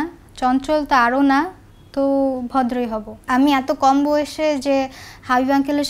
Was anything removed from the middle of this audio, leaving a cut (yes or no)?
yes